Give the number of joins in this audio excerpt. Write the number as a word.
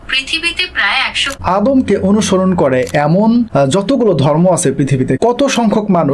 two